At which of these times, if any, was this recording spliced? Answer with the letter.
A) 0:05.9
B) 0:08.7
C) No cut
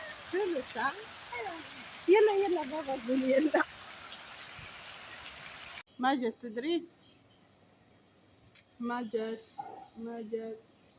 A